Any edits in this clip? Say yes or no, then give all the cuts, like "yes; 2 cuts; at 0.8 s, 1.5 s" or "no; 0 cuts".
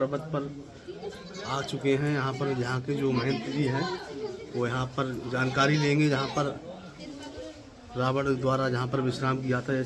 no; 0 cuts